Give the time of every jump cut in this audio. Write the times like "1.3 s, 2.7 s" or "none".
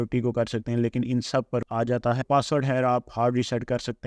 1.8 s